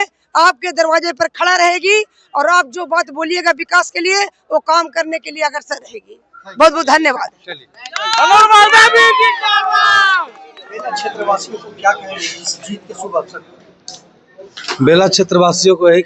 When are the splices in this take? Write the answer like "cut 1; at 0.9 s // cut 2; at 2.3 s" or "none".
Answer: cut 1; at 11.1 s